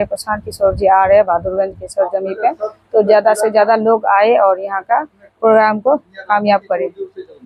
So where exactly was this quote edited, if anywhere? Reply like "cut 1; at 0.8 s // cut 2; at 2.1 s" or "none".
none

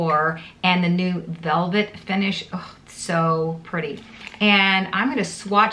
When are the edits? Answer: cut 1; at 4.2 s

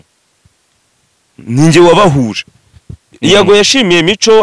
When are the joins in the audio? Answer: cut 1; at 3.0 s

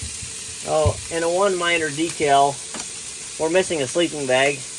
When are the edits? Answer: none

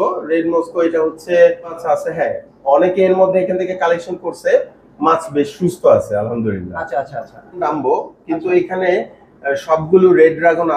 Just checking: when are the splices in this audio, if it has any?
cut 1; at 1.8 s // cut 2; at 7.7 s

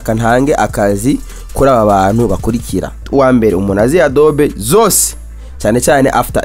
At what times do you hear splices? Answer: cut 1; at 3.0 s

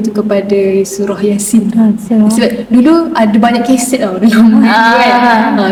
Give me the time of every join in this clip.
none

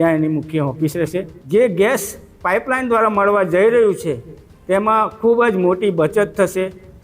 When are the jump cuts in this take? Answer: cut 1; at 1.3 s

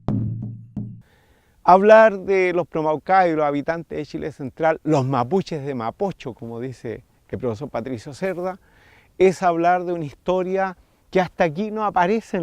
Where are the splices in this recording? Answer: cut 1; at 0.9 s

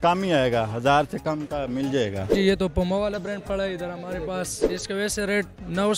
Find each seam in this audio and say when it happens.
cut 1; at 2.3 s // cut 2; at 4.6 s

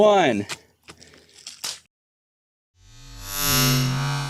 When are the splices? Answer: none

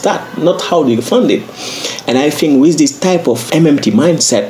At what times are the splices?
cut 1; at 3.5 s

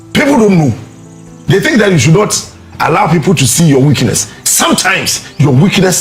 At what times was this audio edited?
none

